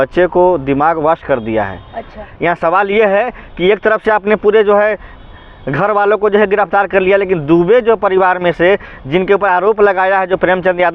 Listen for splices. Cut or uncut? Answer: cut